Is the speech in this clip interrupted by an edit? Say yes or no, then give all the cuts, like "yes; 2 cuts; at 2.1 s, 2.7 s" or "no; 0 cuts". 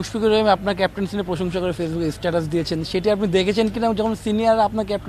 no; 0 cuts